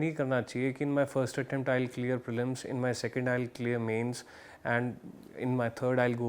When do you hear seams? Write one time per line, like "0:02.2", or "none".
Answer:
none